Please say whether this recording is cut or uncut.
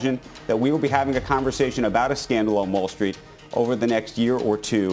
uncut